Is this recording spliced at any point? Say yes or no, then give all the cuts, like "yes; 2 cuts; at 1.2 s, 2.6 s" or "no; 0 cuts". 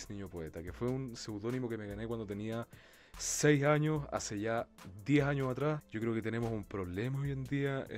yes; 1 cut; at 5.9 s